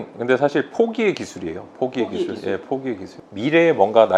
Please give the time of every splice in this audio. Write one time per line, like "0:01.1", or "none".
0:03.1